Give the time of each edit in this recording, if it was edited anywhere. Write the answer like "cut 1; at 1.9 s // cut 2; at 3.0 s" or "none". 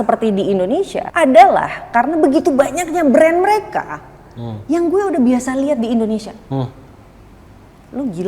cut 1; at 1.0 s // cut 2; at 6.4 s